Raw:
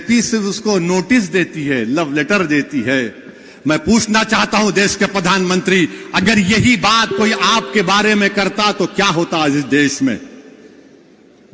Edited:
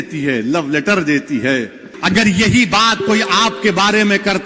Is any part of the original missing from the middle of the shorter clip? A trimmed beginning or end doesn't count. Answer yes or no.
yes